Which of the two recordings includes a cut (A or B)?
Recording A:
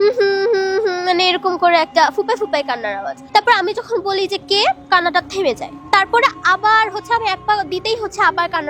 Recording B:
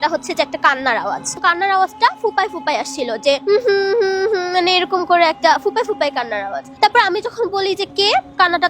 B